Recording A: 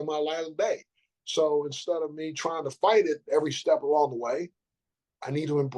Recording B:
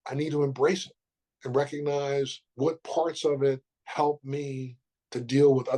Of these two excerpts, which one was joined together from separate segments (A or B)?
B